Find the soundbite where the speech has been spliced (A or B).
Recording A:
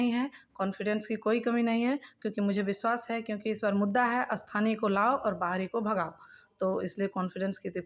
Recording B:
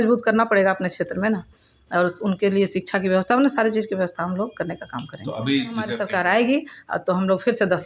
B